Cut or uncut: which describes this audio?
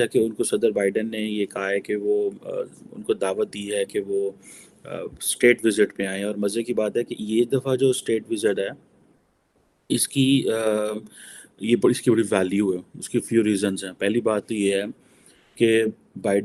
uncut